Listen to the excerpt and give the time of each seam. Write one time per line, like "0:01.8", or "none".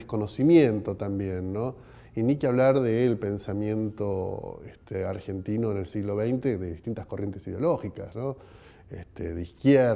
none